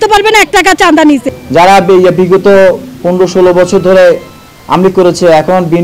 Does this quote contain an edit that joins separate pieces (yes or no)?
yes